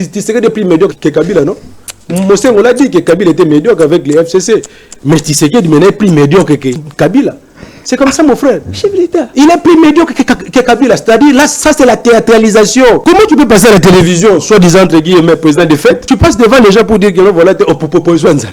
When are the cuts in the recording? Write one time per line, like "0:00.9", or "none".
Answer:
0:01.0
0:06.8
0:13.0
0:16.0